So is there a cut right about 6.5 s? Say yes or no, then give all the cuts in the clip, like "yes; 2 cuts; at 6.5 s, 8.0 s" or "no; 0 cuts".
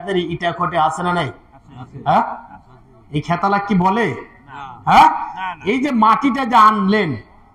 no; 0 cuts